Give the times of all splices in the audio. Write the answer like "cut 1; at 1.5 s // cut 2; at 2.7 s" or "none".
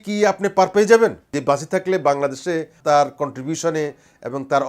cut 1; at 1.3 s // cut 2; at 2.8 s